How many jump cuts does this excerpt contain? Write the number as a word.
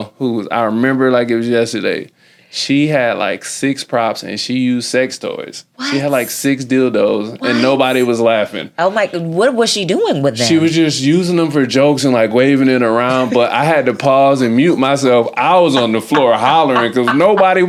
zero